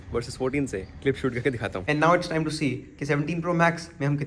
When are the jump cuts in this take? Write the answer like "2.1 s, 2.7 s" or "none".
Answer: 1.8 s